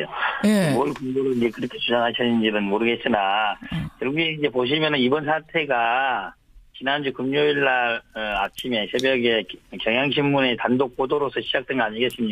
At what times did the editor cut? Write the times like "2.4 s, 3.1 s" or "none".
5.2 s